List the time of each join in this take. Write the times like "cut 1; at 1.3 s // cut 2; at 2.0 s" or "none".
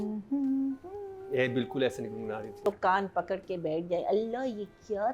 cut 1; at 2.7 s